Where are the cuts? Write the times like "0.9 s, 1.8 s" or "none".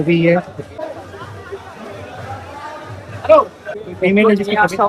1.0 s, 3.8 s